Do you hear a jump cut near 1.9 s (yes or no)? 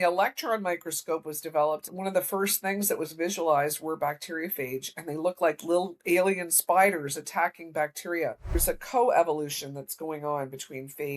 yes